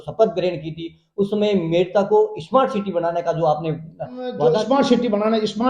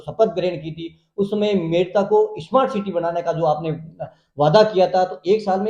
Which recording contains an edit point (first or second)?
first